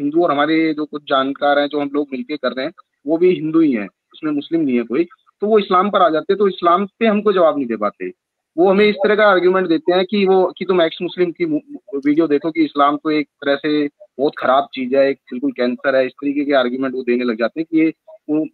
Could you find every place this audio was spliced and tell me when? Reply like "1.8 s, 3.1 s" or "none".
none